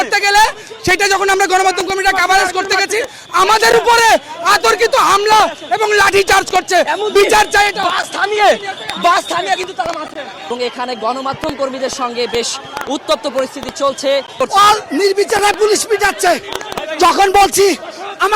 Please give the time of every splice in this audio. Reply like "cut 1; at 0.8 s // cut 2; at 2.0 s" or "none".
cut 1; at 10.5 s // cut 2; at 14.4 s

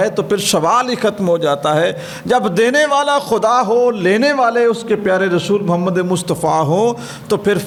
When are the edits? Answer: none

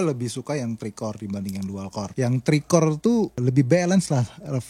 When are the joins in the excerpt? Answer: cut 1; at 2.1 s // cut 2; at 3.4 s

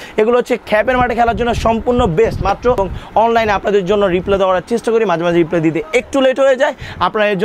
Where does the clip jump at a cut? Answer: cut 1; at 2.8 s

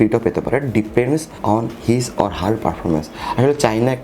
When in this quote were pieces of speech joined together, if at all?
cut 1; at 1.3 s

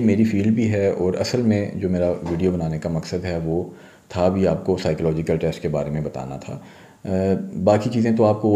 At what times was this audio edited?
none

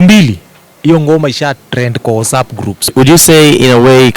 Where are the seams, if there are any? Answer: cut 1; at 2.9 s

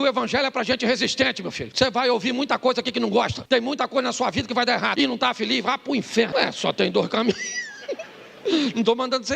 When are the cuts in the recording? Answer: cut 1; at 1.6 s // cut 2; at 3.4 s // cut 3; at 4.9 s // cut 4; at 6.3 s

